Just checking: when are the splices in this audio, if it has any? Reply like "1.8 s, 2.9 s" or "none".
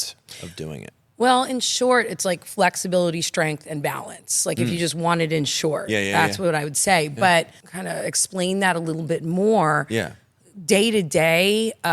7.6 s